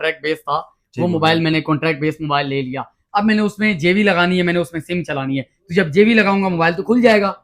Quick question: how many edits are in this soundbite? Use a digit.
0